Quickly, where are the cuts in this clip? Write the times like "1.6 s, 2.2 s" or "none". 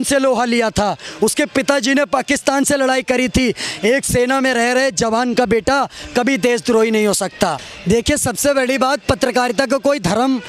7.6 s